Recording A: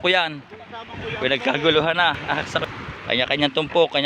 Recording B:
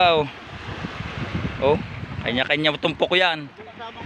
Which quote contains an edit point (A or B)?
A